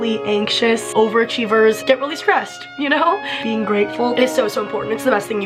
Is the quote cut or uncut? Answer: uncut